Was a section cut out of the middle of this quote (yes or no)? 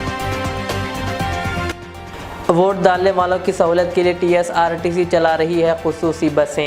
yes